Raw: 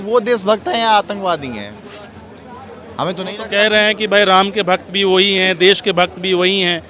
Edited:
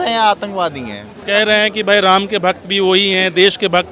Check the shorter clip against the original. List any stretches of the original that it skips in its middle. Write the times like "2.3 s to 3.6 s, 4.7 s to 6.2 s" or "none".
1.8 s to 3.4 s